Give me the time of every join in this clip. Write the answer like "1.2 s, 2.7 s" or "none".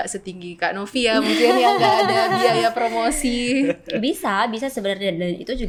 none

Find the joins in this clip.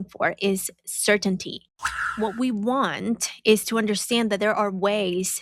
1.9 s

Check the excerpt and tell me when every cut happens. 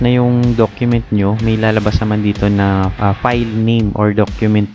2.9 s

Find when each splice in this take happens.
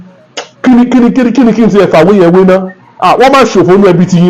none

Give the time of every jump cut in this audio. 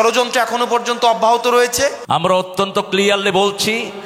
2.0 s

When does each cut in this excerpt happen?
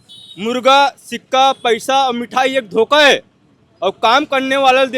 none

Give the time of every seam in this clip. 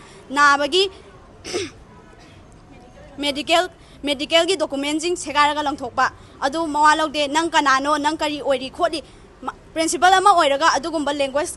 none

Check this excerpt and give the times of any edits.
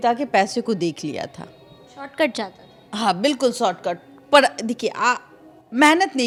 none

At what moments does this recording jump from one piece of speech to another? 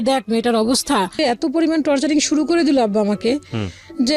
1.1 s

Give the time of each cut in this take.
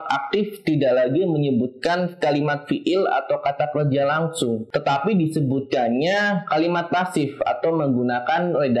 4.6 s

